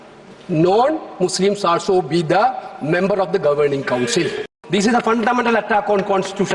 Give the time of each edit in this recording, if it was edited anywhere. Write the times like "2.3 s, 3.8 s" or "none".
4.6 s